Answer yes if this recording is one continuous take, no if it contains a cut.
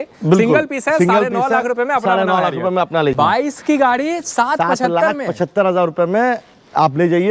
no